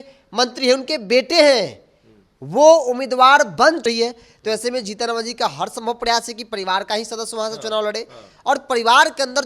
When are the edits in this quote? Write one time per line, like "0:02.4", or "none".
0:03.8

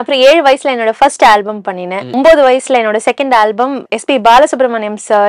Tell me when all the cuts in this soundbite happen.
0:02.1
0:03.9

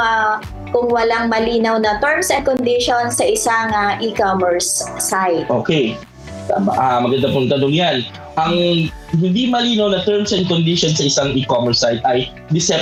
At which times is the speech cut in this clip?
none

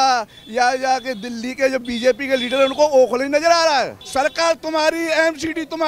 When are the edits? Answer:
0:04.0

